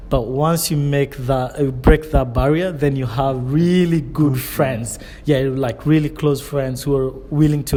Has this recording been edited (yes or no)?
no